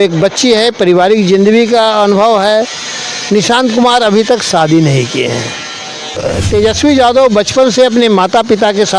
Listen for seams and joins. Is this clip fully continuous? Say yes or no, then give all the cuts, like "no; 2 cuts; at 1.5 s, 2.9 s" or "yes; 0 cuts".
no; 1 cut; at 6.2 s